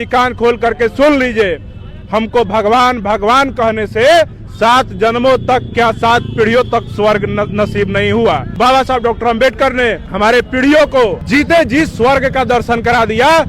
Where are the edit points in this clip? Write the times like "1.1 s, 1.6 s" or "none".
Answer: 8.5 s, 10.0 s, 11.2 s